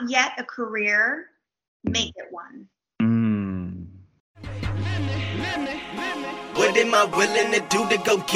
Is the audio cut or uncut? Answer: cut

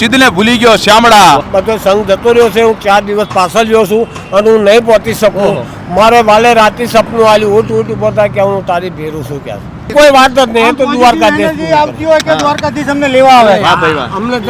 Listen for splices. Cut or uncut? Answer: cut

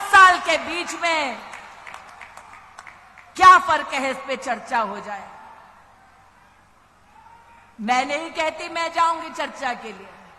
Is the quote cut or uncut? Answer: uncut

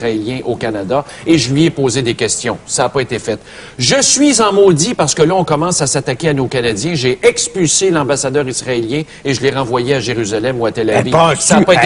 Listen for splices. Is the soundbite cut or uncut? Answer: cut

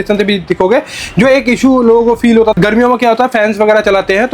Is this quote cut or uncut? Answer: cut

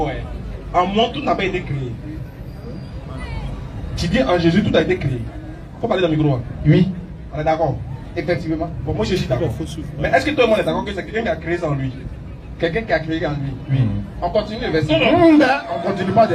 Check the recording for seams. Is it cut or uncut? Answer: uncut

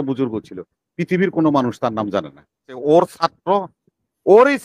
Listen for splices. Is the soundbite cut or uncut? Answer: cut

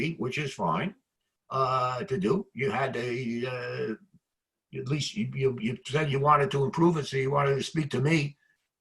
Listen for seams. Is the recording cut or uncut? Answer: uncut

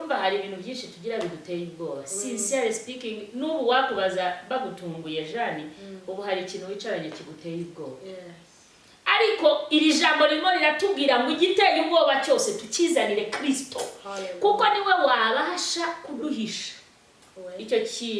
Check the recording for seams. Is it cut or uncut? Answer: uncut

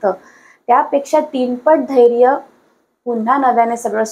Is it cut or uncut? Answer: uncut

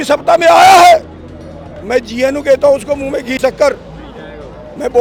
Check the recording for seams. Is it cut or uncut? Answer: uncut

